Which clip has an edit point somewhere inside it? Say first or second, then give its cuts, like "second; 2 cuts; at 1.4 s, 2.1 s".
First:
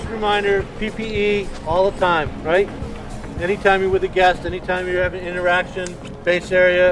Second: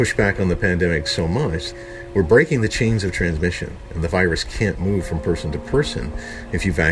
second; 1 cut; at 1.7 s